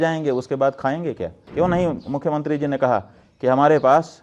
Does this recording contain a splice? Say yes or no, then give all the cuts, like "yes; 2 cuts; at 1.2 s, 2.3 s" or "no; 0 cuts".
yes; 1 cut; at 1.4 s